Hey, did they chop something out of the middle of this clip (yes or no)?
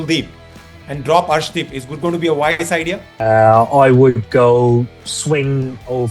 yes